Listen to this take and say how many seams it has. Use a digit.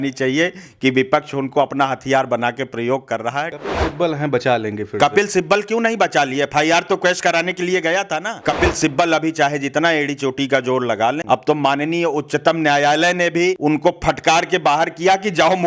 4